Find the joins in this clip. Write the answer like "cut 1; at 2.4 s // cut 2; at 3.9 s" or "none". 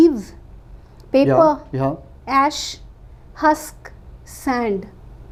none